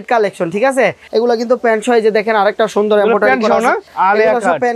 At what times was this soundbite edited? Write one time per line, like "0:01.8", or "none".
0:01.0
0:03.9